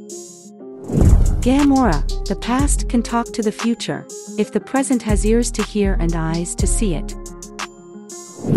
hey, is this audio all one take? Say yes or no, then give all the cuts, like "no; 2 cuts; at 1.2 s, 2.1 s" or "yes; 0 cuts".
no; 1 cut; at 1.1 s